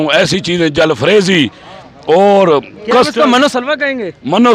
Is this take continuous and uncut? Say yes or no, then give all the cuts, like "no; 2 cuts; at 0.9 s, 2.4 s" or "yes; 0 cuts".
yes; 0 cuts